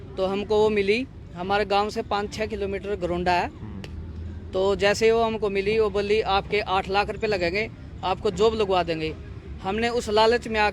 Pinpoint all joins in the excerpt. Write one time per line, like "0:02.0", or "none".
none